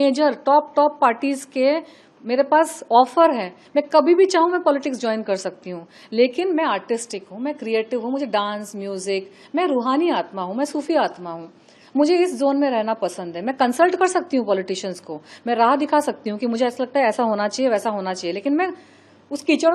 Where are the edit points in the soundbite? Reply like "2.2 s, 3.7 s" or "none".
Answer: none

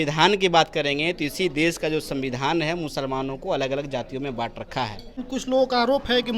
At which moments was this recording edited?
5.2 s

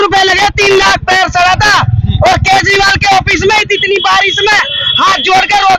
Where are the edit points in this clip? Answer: none

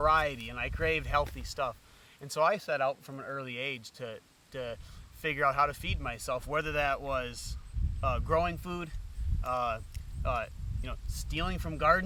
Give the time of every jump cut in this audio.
none

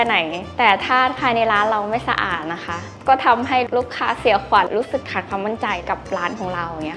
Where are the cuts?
3.7 s, 4.7 s, 5.8 s

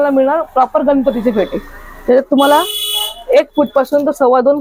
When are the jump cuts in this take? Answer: none

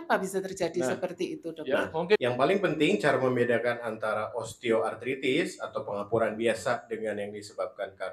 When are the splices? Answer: 2.2 s

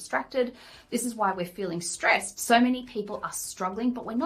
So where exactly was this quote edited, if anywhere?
2.3 s

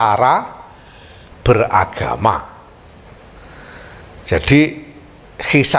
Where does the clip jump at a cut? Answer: none

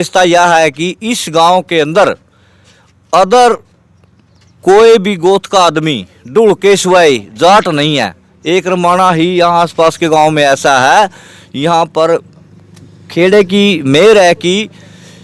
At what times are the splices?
none

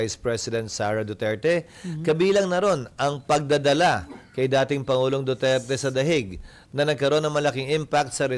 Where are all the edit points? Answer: none

